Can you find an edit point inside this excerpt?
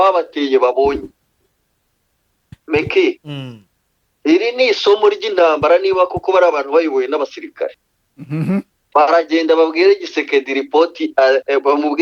no; 0 cuts

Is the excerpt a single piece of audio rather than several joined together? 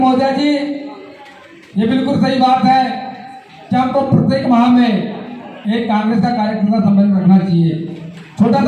yes; 0 cuts

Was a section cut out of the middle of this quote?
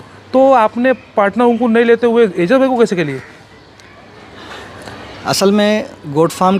no; 0 cuts

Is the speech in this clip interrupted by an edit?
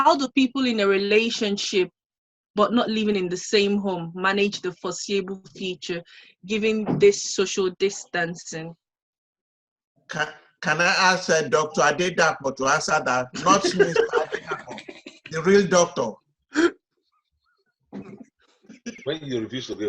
yes; 1 cut; at 19.0 s

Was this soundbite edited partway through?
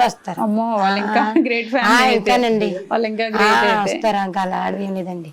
no; 0 cuts

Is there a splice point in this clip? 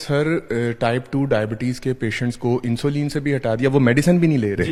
no; 0 cuts

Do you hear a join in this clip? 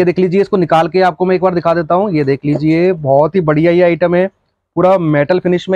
no; 0 cuts

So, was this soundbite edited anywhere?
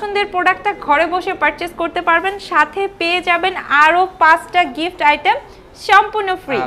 no; 0 cuts

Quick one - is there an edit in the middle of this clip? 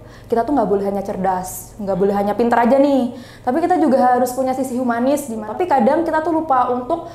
yes; 1 cut; at 5.4 s

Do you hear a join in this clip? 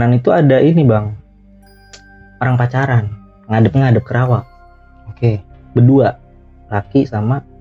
no; 0 cuts

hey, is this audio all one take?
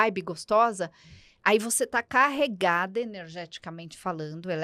yes; 0 cuts

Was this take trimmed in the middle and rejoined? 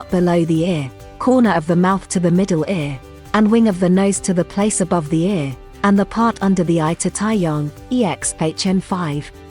no; 0 cuts

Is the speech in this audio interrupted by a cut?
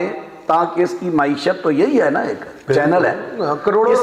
no; 0 cuts

